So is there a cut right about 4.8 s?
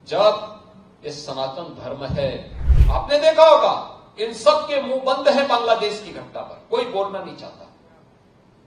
no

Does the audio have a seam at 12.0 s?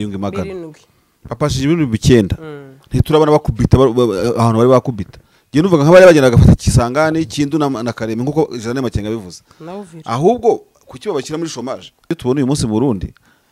yes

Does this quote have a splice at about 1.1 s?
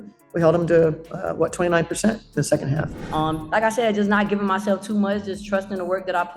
no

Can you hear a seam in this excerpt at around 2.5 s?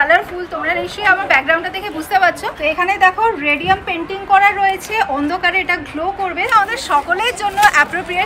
yes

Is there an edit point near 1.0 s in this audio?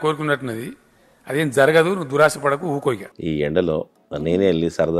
no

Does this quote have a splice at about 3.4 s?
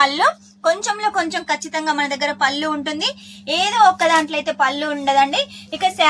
no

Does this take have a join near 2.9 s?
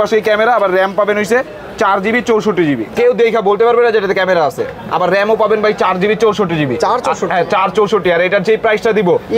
yes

